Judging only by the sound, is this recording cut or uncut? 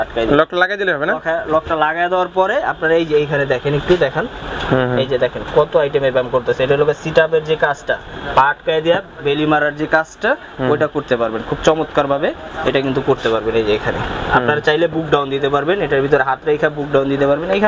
uncut